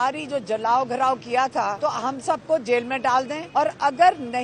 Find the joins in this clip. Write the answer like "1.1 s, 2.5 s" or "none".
1.7 s, 3.4 s